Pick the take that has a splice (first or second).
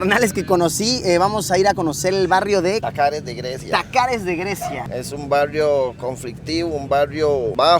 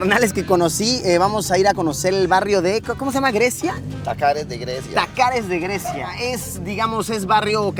first